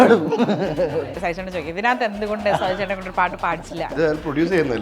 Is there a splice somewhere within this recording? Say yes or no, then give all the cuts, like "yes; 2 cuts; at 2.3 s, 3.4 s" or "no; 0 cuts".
yes; 2 cuts; at 1.1 s, 3.9 s